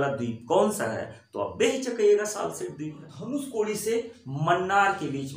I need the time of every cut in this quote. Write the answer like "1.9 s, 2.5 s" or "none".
3.1 s